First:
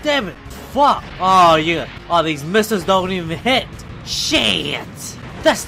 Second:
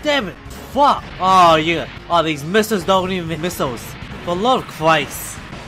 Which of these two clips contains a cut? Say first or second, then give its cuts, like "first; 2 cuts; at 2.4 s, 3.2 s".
first; 1 cut; at 3.3 s